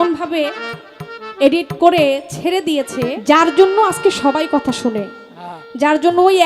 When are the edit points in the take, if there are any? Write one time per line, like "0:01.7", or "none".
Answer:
0:03.2